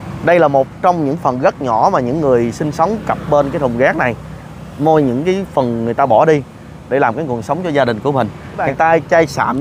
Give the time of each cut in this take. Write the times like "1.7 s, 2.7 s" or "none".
8.7 s